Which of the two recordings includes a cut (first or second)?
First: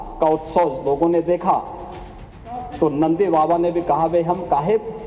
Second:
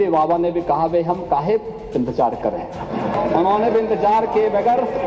second